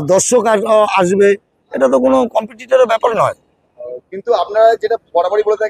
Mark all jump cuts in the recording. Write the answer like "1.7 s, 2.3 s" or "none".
none